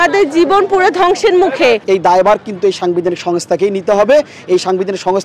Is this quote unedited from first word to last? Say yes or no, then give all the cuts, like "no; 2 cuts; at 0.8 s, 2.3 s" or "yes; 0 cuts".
no; 1 cut; at 1.8 s